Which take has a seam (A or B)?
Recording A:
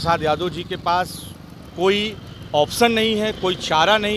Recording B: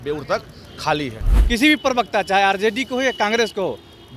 B